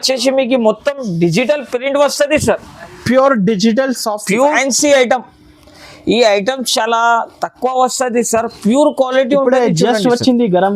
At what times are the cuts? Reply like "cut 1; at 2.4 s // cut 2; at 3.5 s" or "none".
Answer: cut 1; at 4.5 s